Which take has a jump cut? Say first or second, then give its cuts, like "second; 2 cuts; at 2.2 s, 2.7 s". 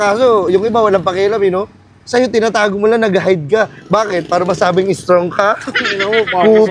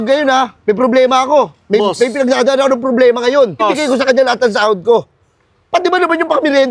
second; 1 cut; at 3.6 s